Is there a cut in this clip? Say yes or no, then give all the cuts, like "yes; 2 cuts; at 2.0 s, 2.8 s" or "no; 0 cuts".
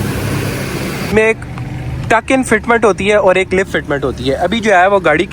yes; 1 cut; at 1.1 s